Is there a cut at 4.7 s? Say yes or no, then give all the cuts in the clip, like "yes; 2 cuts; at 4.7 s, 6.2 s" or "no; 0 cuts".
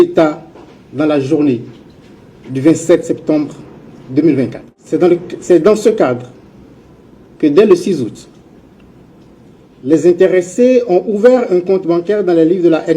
yes; 1 cut; at 4.7 s